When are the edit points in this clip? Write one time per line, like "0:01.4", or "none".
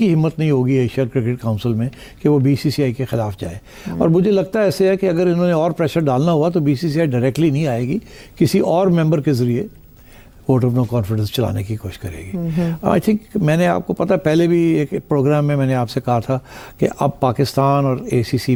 none